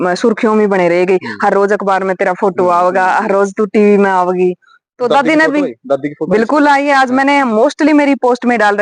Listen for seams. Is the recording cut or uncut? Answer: uncut